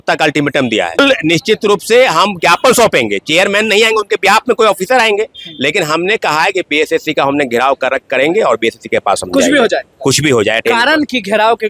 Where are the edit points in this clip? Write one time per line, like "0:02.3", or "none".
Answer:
0:01.0